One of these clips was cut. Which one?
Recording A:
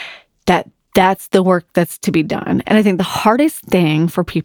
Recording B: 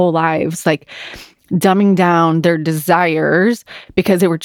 A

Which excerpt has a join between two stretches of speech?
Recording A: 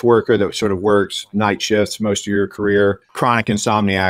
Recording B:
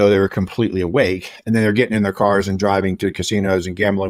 A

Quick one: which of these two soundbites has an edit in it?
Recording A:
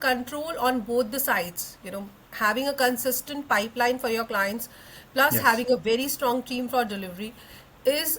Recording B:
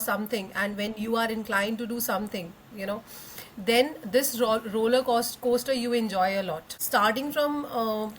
B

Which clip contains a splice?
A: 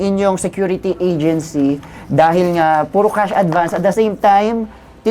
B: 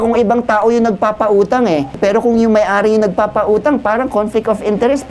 B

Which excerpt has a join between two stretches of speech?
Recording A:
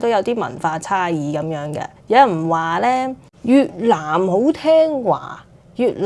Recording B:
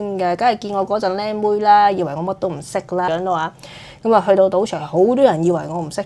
B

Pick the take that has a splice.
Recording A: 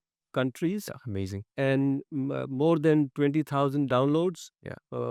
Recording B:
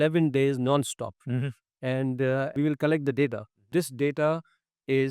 B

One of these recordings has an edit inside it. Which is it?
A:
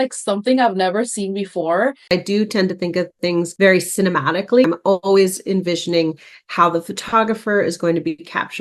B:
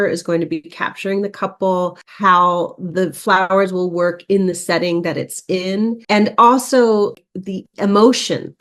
A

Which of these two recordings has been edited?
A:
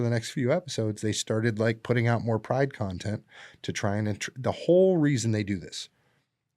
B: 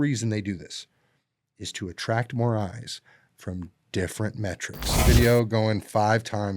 B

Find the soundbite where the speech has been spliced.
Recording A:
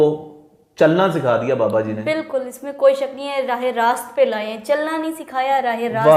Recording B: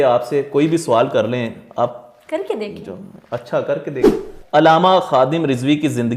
B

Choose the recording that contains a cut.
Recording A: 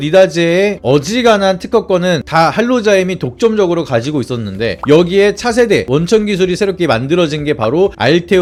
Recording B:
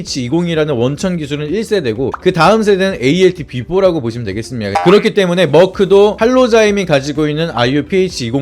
B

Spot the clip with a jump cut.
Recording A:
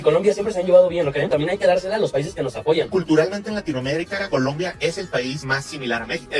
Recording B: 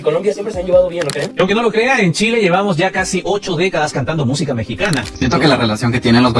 B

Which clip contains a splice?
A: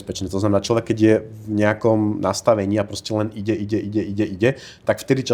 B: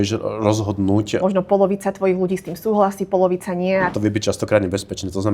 B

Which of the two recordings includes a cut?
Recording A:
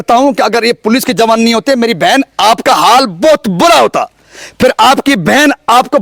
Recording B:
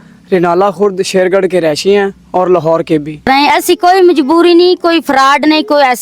B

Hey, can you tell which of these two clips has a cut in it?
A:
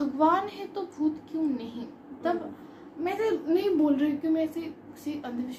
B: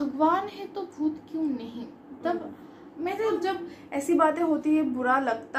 B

